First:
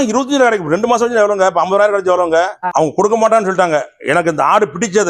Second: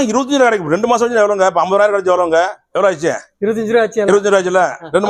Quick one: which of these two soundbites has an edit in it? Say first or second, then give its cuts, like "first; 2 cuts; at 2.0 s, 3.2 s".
first; 1 cut; at 2.6 s